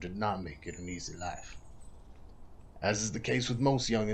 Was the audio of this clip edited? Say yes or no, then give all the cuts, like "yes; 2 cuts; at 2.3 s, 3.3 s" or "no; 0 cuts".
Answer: no; 0 cuts